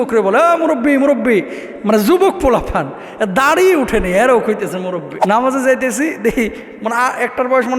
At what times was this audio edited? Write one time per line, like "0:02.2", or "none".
0:05.1